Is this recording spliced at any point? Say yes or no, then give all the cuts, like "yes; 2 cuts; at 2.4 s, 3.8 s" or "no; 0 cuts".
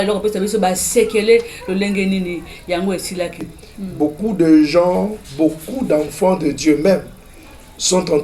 yes; 1 cut; at 3.5 s